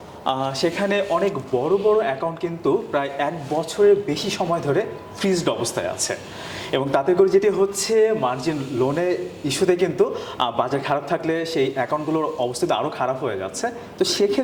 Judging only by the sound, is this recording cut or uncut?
uncut